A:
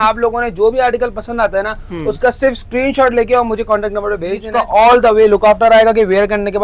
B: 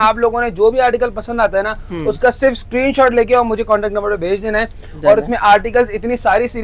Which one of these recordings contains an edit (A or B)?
A